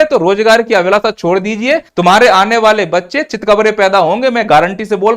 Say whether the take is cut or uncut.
cut